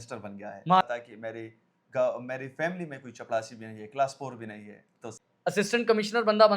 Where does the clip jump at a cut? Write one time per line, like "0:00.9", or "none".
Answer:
0:00.8
0:05.2